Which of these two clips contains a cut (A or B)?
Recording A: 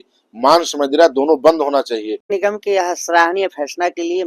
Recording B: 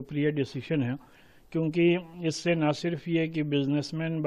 A